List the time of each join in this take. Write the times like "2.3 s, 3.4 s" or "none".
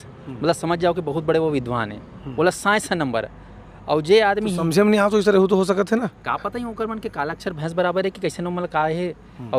none